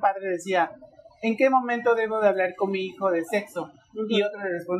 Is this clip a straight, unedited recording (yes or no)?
yes